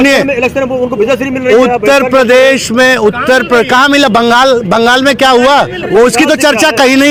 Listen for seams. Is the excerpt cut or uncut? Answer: uncut